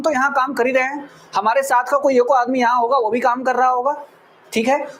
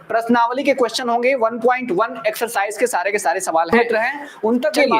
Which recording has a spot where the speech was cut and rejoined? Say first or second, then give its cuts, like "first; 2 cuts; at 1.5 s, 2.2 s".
second; 1 cut; at 3.7 s